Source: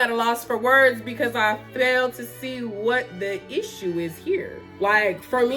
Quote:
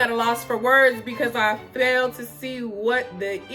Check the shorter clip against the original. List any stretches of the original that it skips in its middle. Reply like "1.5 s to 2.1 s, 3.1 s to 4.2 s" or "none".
none